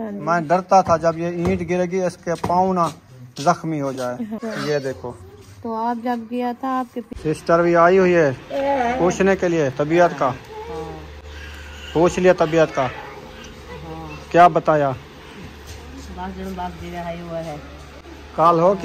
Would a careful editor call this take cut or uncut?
cut